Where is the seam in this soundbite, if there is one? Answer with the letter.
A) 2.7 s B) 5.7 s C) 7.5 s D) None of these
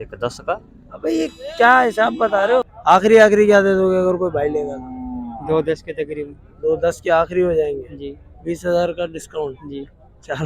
A